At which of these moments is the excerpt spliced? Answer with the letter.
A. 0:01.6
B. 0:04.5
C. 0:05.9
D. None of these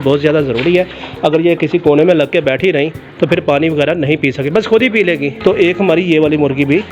D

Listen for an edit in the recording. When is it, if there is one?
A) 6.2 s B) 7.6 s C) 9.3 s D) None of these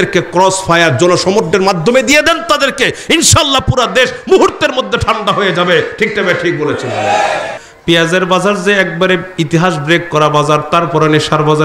B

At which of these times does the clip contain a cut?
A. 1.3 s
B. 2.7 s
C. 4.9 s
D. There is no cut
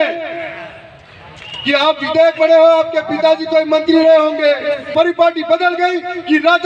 C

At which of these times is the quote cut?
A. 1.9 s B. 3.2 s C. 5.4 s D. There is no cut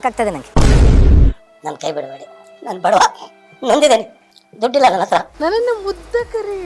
C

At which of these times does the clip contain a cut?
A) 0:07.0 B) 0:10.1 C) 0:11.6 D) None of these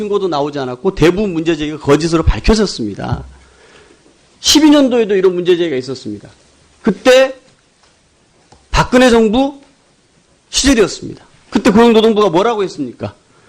C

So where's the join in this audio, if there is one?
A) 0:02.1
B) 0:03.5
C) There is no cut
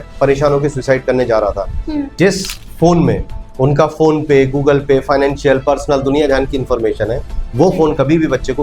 A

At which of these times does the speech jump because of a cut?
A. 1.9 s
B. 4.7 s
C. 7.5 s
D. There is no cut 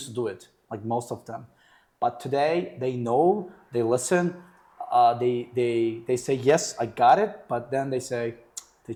D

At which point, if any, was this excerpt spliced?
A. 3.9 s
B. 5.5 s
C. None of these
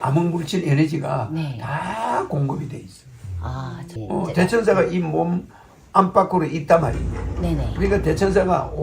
A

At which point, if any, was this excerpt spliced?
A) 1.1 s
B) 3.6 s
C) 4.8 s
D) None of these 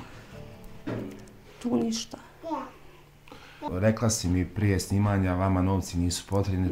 B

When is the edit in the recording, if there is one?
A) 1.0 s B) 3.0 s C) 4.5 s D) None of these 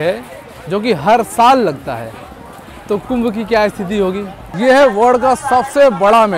C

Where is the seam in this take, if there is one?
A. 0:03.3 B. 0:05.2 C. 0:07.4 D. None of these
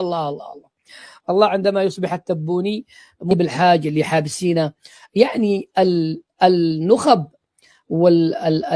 A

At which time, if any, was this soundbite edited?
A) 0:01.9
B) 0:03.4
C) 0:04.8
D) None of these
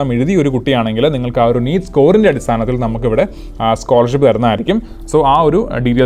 D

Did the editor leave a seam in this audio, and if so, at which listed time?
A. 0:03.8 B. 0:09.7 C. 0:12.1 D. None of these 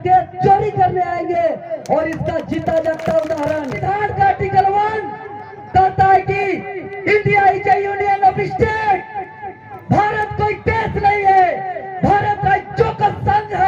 A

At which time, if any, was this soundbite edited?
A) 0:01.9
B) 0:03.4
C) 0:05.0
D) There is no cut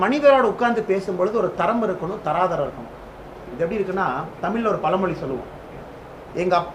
B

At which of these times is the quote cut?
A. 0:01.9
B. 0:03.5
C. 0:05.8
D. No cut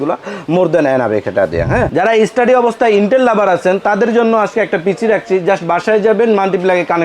A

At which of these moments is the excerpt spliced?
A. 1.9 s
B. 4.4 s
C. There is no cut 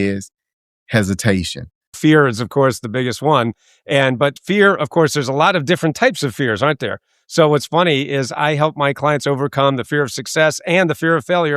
A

